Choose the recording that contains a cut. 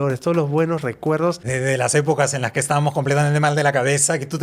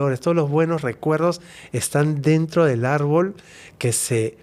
first; 1 cut; at 1.5 s

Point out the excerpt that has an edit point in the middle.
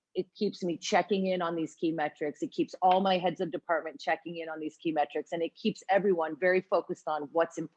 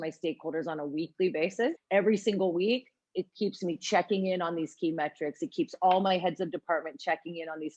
second; 1 cut; at 1.8 s

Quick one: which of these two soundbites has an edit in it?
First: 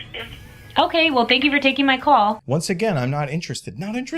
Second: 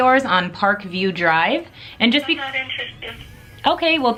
first; 1 cut; at 2.4 s

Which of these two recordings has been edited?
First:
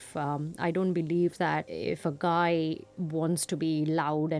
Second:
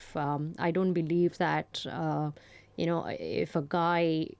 first; 1 cut; at 1.7 s

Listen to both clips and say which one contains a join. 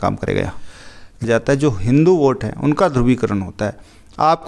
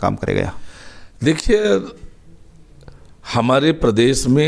first; 1 cut; at 1.2 s

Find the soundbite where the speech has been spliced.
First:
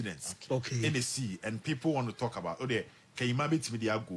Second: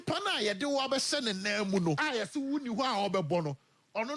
second; 1 cut; at 2.0 s

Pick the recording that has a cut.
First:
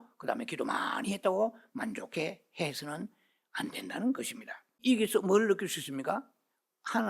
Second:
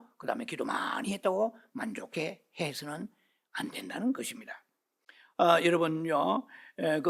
first; 1 cut; at 4.8 s

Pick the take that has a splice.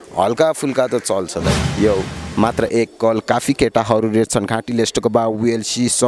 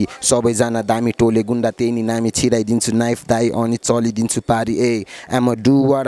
first; 1 cut; at 1.6 s

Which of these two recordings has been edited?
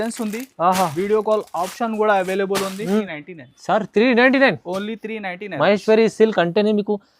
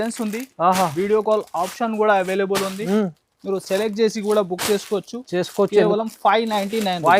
first; 1 cut; at 3.2 s

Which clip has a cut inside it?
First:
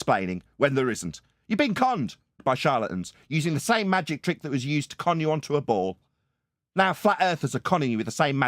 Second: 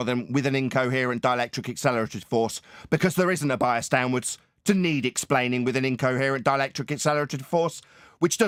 first; 1 cut; at 2.4 s

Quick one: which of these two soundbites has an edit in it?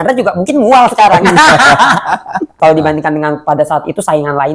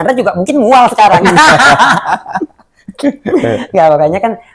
first; 1 cut; at 2.5 s

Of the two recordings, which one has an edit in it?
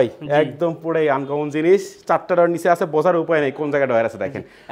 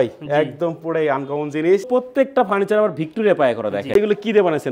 second; 2 cuts; at 1.9 s, 4.0 s

